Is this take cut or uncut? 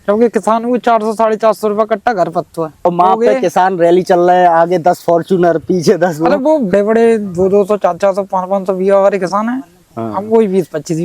cut